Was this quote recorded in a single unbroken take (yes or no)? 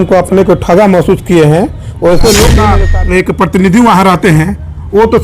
no